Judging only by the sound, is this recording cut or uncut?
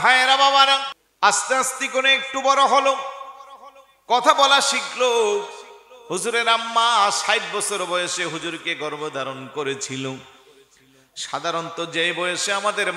cut